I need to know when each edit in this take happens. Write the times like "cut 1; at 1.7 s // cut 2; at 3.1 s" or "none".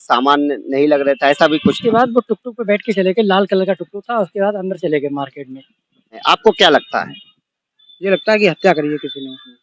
cut 1; at 1.8 s // cut 2; at 6.2 s